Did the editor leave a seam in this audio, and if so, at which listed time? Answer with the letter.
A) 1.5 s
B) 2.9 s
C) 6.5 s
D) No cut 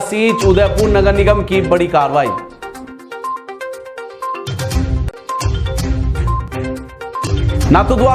D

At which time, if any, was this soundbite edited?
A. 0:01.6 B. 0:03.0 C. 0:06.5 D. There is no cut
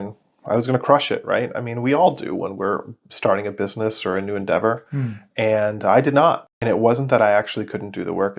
C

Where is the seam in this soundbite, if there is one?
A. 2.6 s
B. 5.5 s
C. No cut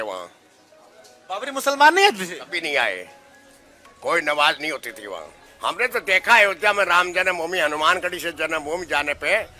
B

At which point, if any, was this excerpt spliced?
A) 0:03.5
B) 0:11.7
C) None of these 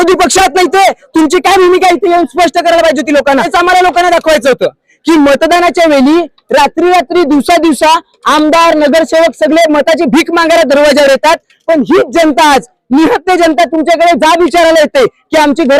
A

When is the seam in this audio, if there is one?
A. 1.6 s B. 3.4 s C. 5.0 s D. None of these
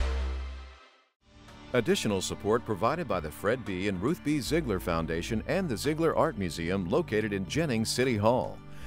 A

